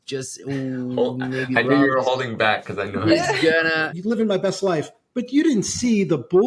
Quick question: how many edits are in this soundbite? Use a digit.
1